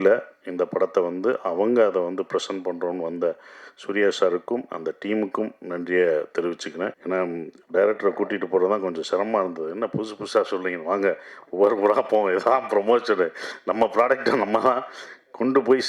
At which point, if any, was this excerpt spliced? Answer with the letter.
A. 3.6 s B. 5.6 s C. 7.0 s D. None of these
C